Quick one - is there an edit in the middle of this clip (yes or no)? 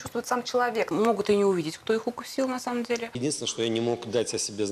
yes